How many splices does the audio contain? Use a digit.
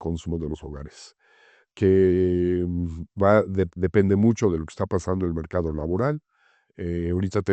0